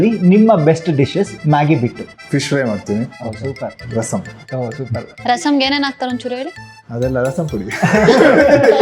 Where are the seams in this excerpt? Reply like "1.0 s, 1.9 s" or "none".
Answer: 3.8 s